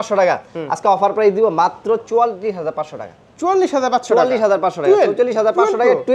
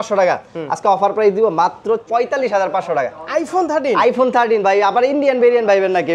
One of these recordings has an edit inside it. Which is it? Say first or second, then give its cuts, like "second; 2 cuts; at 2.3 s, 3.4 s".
second; 1 cut; at 2.0 s